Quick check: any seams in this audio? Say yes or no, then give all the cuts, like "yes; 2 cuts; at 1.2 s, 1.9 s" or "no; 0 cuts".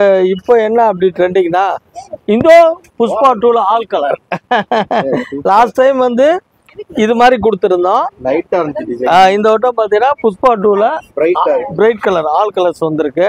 no; 0 cuts